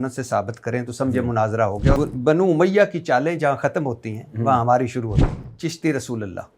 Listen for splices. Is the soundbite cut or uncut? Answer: cut